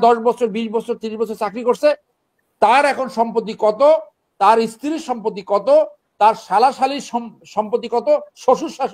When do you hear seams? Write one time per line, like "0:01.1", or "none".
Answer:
none